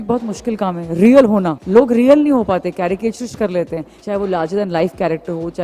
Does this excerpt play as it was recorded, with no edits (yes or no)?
no